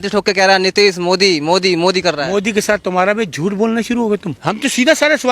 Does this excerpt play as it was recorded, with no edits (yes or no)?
no